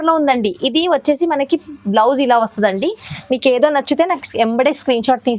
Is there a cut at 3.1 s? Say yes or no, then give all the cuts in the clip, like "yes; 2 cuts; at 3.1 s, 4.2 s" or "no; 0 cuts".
yes; 1 cut; at 3.1 s